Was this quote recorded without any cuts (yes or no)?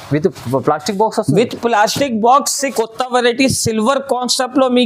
no